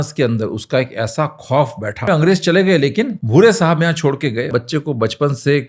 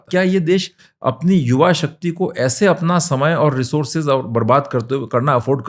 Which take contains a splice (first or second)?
first